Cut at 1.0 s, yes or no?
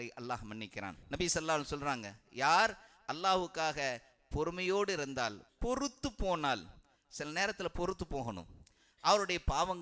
yes